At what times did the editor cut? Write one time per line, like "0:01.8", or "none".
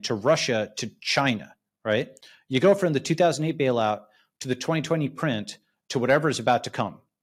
none